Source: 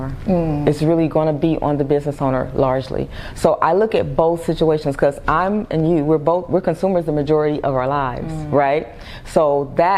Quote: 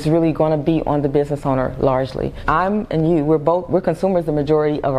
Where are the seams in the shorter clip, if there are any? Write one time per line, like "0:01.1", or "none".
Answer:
0:02.4